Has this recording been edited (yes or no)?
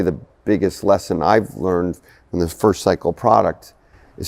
no